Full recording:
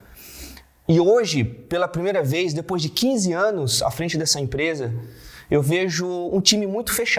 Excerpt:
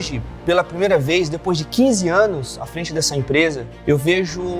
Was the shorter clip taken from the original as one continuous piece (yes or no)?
no